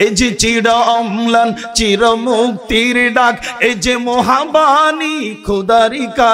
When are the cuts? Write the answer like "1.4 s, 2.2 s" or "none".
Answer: none

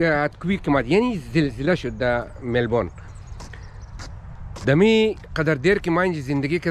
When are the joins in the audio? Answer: none

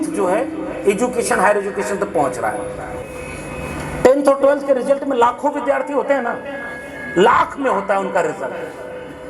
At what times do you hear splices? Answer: 3.0 s

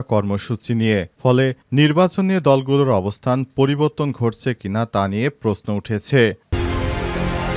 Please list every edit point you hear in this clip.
6.5 s

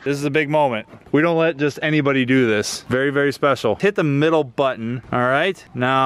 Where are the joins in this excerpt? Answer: 2.8 s, 3.8 s

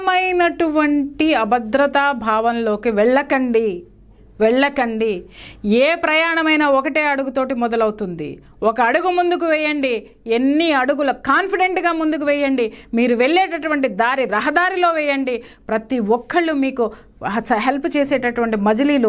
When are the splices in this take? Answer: none

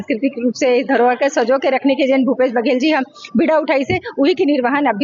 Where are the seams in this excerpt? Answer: none

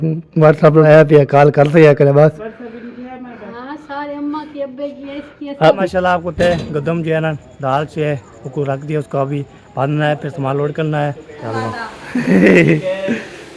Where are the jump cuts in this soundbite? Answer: 0.9 s, 5.8 s, 11.6 s

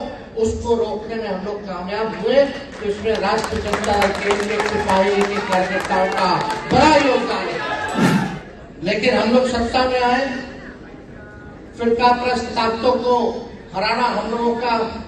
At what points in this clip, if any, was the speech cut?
8.3 s

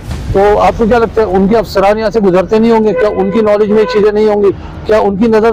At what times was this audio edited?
none

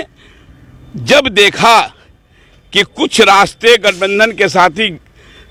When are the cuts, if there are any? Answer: none

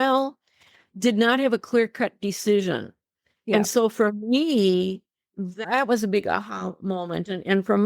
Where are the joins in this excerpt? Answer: 5.6 s

